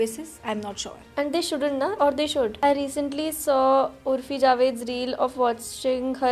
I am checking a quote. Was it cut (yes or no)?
yes